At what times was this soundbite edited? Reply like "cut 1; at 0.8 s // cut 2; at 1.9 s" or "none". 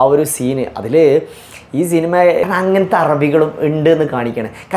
cut 1; at 2.4 s

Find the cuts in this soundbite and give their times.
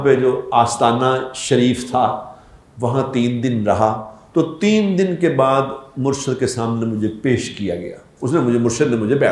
cut 1; at 4.1 s // cut 2; at 8.0 s

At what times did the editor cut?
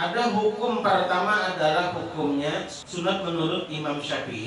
cut 1; at 2.8 s

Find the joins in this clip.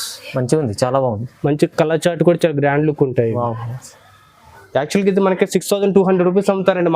cut 1; at 4.5 s

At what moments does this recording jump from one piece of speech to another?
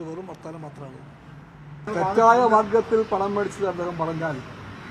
cut 1; at 1.9 s

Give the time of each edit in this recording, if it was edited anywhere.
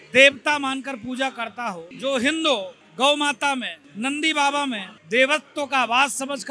cut 1; at 1.9 s // cut 2; at 4.9 s

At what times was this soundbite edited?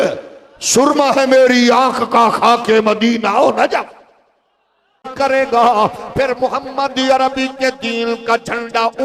cut 1; at 5.0 s

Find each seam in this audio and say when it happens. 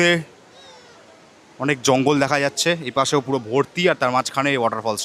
none

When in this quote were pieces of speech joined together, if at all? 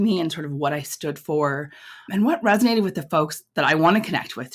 none

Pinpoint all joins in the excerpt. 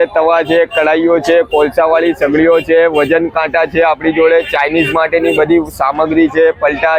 none

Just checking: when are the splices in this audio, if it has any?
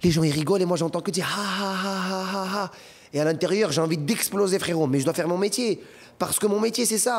none

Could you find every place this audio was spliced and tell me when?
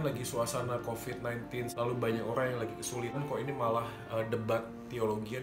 cut 1; at 1.7 s // cut 2; at 3.2 s

